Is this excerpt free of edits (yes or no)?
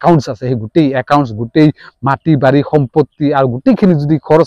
yes